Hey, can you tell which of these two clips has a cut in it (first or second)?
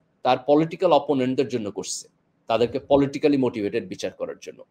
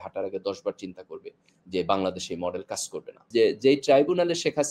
second